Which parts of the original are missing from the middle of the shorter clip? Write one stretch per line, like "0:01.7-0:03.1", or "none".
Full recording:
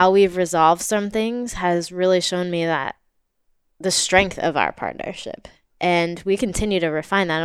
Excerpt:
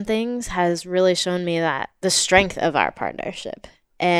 0:02.9-0:03.7